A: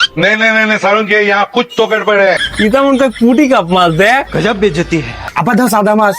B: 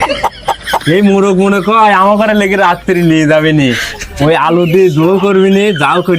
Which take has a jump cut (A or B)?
A